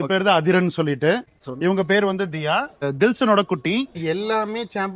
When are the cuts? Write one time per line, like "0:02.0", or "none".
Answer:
0:01.3
0:02.9
0:04.0